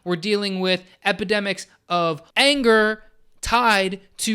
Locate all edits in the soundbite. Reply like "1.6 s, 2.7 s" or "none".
2.2 s